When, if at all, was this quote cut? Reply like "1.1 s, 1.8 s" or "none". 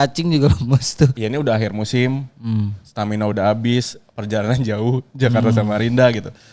1.2 s